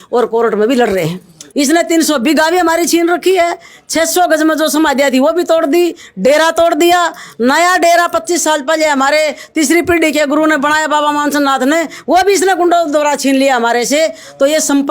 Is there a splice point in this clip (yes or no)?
yes